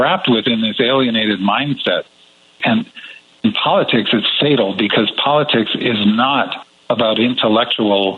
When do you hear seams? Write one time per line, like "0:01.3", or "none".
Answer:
0:02.5